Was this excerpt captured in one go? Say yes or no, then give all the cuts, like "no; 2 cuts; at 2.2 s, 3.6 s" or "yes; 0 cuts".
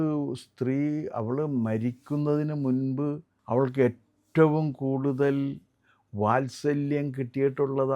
no; 1 cut; at 3.3 s